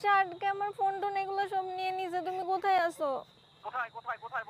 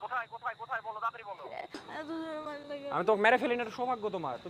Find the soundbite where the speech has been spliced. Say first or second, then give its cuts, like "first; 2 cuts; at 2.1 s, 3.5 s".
second; 1 cut; at 1.9 s